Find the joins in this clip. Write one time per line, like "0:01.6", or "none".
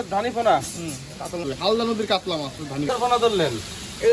0:01.5
0:02.9